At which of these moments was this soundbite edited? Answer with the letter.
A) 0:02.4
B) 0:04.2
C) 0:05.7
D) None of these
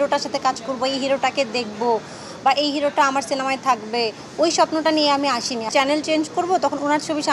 C